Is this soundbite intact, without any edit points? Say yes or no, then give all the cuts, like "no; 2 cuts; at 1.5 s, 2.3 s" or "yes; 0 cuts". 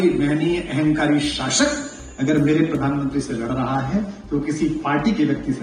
yes; 0 cuts